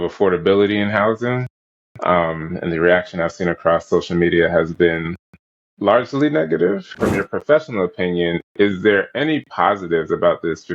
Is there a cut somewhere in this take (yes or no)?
yes